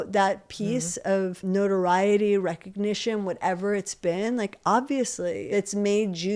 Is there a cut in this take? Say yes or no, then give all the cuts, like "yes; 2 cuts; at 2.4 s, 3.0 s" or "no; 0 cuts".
yes; 2 cuts; at 1.4 s, 5.5 s